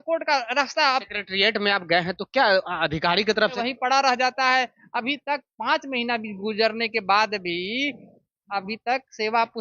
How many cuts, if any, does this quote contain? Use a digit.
1